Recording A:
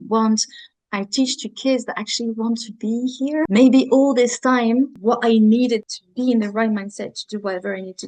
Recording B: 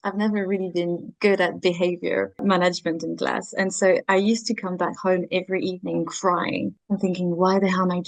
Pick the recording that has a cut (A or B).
A